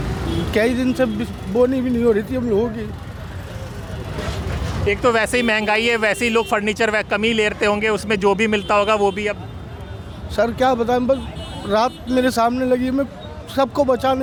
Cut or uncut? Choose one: uncut